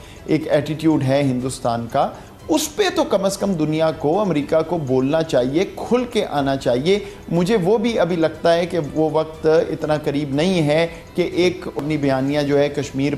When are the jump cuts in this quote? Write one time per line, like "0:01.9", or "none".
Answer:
0:11.8

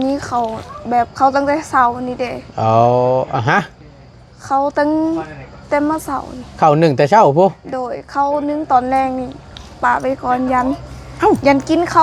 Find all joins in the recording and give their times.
none

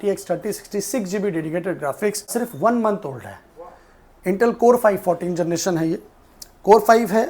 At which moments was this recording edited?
0:02.3

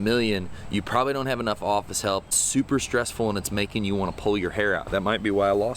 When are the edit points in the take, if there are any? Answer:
0:02.4
0:04.8

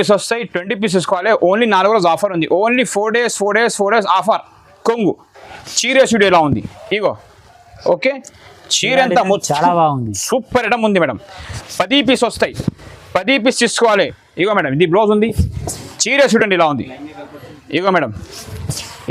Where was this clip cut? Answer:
0:04.6
0:14.2

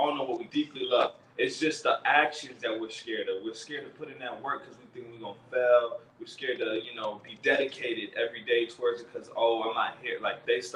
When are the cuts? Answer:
none

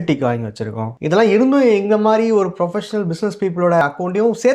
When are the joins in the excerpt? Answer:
0:00.9

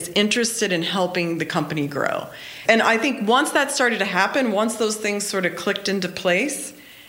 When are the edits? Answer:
0:02.6

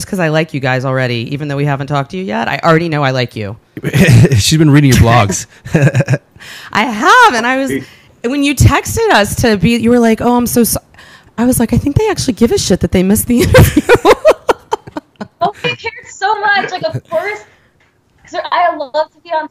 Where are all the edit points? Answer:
none

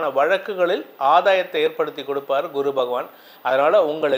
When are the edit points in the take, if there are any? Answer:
none

